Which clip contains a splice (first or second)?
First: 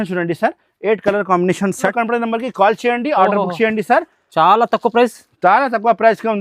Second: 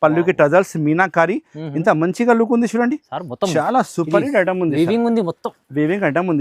first